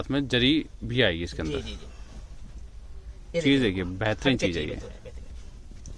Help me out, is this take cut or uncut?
uncut